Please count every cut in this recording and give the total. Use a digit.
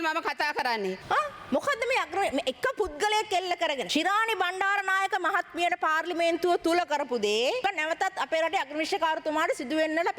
3